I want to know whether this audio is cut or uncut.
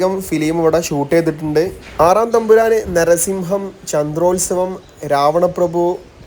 uncut